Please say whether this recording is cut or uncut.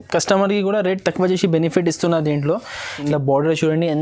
cut